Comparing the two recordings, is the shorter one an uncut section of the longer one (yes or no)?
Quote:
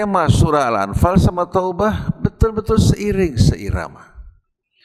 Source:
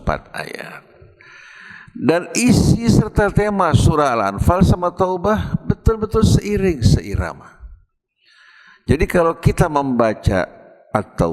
yes